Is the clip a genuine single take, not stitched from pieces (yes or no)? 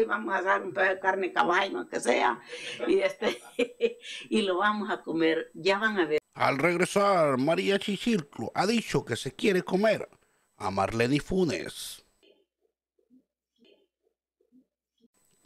no